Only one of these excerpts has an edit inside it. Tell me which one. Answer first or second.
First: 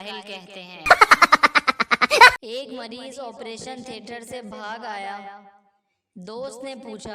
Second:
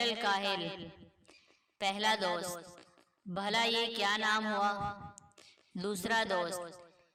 first